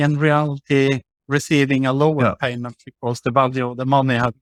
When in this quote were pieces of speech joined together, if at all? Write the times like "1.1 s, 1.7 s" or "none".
none